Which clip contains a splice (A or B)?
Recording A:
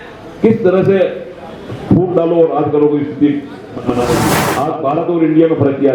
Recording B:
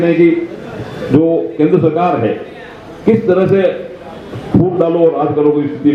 A